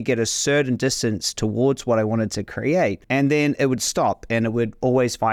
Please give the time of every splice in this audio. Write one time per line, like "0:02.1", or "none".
0:03.0